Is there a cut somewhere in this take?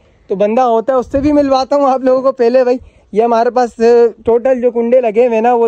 no; 0 cuts

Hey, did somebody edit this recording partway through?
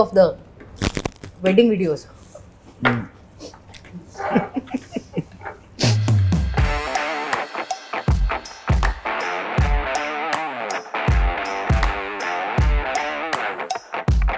no; 0 cuts

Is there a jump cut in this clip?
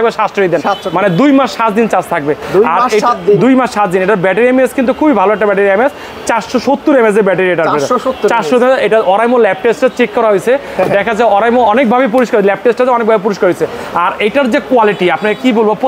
no; 0 cuts

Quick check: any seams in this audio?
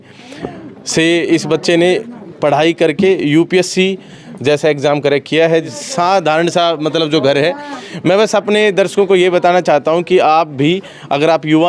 yes; 1 cut; at 5.8 s

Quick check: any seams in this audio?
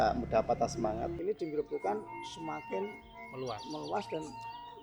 yes; 1 cut; at 1.2 s

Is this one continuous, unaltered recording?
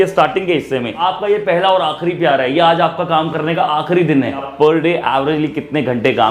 no; 2 cuts; at 1.0 s, 4.5 s

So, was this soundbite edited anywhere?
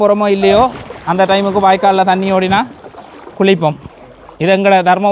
no; 0 cuts

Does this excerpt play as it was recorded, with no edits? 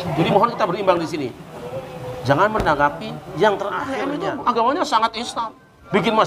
no; 1 cut; at 4.1 s

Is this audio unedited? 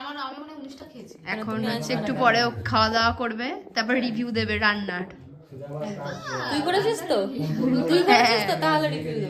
yes; 0 cuts

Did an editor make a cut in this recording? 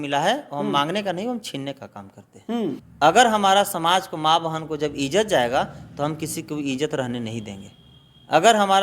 yes; 1 cut; at 2.9 s

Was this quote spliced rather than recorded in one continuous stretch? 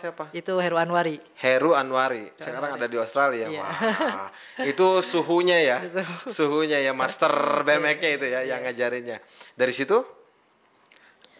no; 0 cuts

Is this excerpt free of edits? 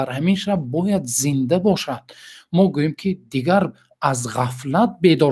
yes; 0 cuts

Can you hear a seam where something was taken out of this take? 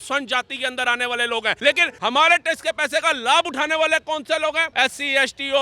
yes; 2 cuts; at 1.7 s, 4.7 s

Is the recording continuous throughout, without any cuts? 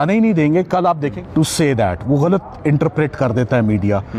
no; 1 cut; at 1.1 s

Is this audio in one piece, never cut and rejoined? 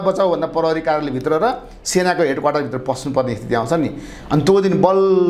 yes; 0 cuts

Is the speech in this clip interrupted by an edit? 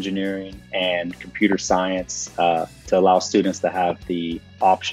no; 0 cuts

